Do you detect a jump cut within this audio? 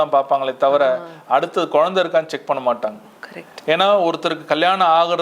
no; 0 cuts

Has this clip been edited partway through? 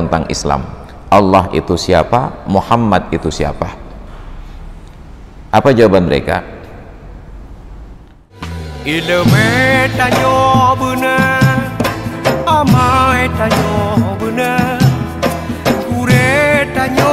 yes; 1 cut; at 8.3 s

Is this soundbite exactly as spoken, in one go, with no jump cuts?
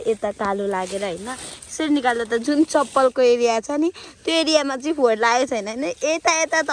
yes; 0 cuts

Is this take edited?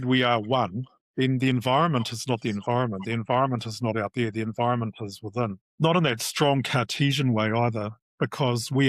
yes; 1 cut; at 5.6 s

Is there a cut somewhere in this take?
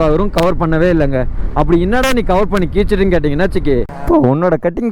yes; 1 cut; at 3.9 s

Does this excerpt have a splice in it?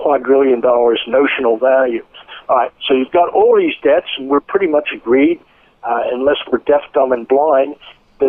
no; 0 cuts

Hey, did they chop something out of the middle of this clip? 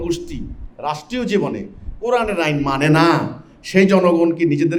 no; 0 cuts

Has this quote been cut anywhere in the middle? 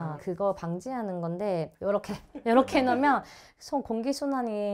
no; 0 cuts

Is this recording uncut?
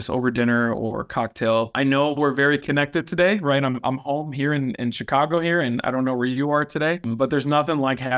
no; 2 cuts; at 1.7 s, 7.1 s

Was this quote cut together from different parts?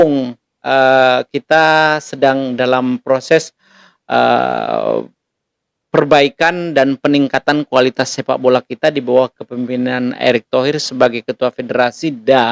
no; 0 cuts

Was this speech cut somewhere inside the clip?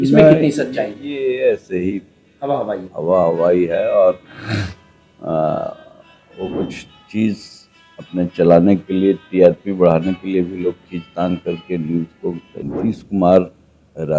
yes; 1 cut; at 12.5 s

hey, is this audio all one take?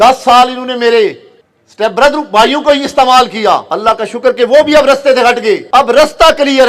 no; 2 cuts; at 3.7 s, 5.6 s

